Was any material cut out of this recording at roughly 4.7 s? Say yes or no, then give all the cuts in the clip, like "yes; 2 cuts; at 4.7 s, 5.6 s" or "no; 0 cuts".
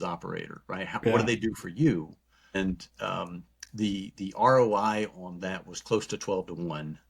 no; 1 cut; at 2.5 s